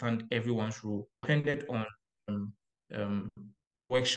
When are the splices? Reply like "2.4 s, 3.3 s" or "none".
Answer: 1.2 s